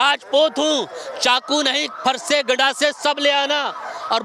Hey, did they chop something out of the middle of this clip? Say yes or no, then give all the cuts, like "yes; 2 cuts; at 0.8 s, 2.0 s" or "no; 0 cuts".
no; 0 cuts